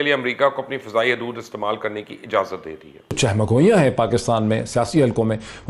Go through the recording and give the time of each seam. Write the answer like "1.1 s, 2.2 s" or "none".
3.2 s